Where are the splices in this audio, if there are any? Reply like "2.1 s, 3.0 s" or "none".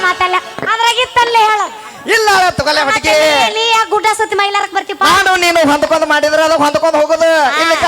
none